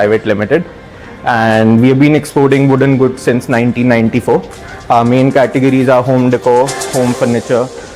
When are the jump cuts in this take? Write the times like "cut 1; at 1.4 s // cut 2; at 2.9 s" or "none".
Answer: none